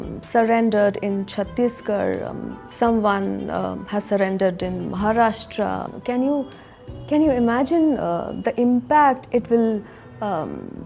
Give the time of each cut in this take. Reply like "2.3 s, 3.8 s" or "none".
5.9 s